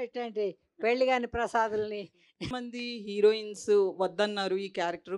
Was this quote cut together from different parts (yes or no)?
yes